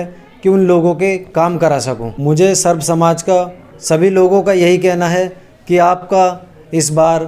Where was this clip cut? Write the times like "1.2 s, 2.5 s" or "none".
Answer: 2.1 s, 3.7 s